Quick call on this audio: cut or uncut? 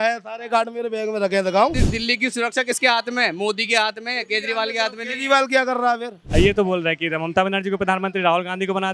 cut